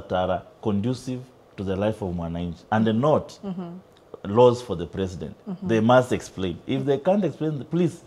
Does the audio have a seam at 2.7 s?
no; 0 cuts

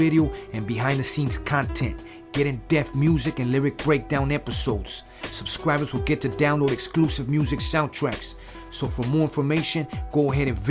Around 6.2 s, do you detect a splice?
no; 0 cuts

